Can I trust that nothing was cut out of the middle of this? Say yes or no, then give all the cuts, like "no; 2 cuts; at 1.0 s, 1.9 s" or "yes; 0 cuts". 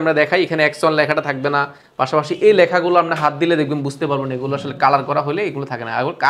yes; 0 cuts